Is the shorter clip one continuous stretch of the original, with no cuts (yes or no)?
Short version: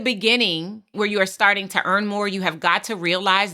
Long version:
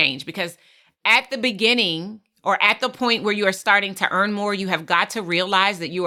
no